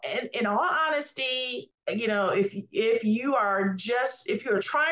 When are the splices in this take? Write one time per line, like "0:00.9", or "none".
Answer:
none

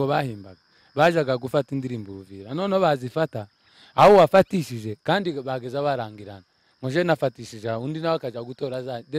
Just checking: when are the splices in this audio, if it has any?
none

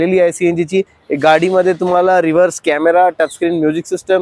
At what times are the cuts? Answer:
0:01.0

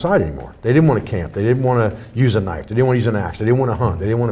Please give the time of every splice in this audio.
none

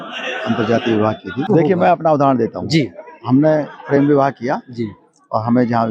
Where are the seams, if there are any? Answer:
0:01.4

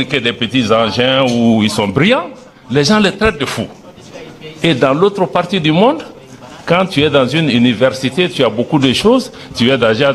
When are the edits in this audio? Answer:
none

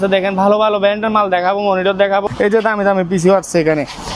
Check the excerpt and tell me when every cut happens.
0:02.3

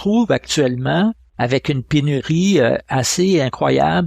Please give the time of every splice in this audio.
0:01.3

